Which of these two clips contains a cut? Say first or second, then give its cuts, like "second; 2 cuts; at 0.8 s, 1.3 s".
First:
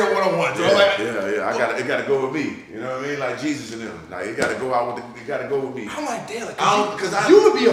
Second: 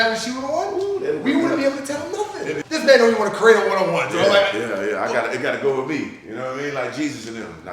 second; 1 cut; at 2.6 s